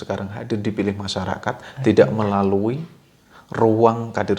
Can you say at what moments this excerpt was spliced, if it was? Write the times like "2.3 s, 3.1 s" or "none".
none